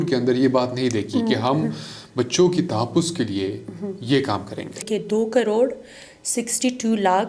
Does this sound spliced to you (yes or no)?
yes